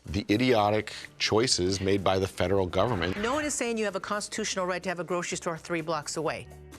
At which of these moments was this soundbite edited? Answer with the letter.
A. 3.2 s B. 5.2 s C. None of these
A